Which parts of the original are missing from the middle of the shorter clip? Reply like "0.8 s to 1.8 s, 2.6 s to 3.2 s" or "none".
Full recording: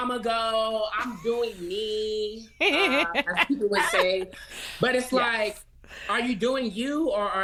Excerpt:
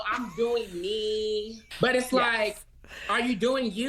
2.4 s to 4.6 s